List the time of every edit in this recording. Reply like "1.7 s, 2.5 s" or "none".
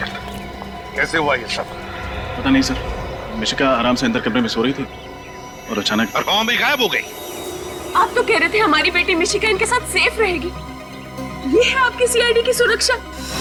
none